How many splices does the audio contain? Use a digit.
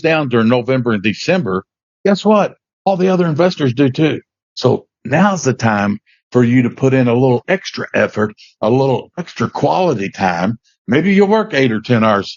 0